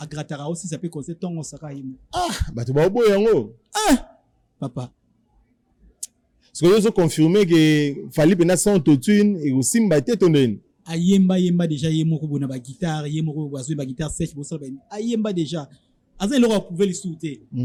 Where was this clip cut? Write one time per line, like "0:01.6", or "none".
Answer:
none